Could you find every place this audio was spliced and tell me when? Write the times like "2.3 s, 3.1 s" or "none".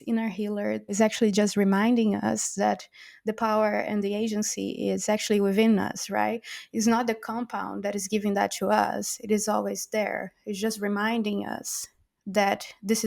0.9 s